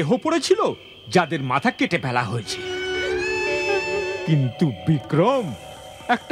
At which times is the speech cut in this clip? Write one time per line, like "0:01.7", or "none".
0:02.7
0:04.2